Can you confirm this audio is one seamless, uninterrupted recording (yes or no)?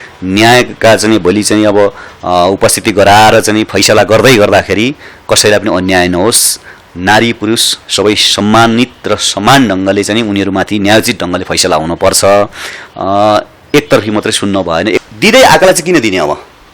no